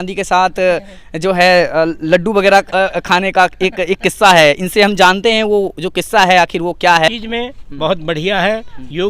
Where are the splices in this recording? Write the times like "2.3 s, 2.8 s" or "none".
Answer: 7.1 s

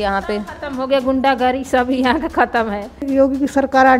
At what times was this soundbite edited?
3.0 s

